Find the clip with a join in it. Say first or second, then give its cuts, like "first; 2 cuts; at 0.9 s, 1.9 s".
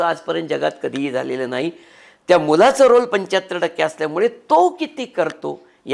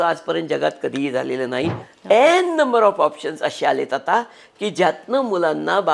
second; 1 cut; at 1.9 s